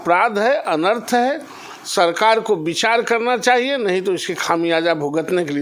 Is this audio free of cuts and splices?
yes; 0 cuts

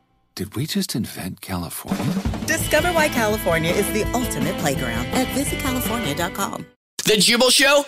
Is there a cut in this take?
yes; 1 cut; at 6.9 s

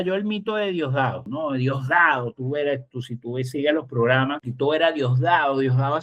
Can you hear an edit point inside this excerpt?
yes; 2 cuts; at 1.2 s, 4.4 s

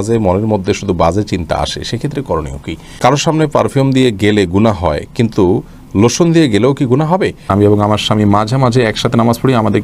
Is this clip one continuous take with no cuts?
no; 2 cuts; at 3.0 s, 7.4 s

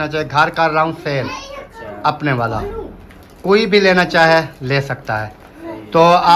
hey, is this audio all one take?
yes; 0 cuts

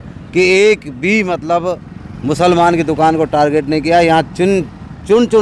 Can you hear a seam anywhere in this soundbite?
no; 0 cuts

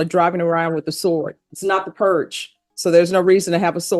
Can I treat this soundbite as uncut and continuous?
no; 1 cut; at 1.4 s

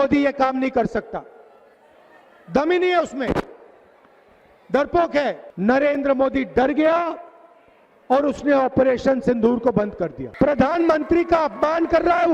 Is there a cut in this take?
yes; 2 cuts; at 5.5 s, 10.2 s

